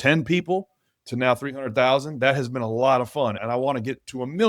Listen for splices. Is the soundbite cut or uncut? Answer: cut